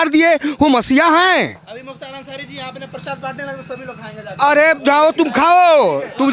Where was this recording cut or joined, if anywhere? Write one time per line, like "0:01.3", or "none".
none